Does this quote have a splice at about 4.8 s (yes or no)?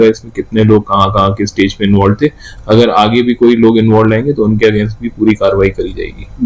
no